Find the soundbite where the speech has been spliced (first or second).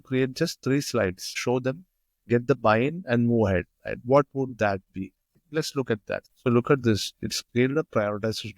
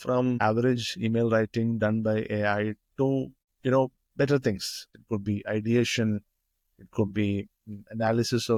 first